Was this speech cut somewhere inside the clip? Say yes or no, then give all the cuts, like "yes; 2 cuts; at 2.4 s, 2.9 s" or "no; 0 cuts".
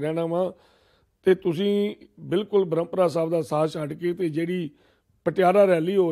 no; 0 cuts